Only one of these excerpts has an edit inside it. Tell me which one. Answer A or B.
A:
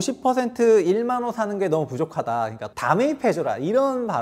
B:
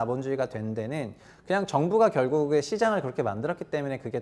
A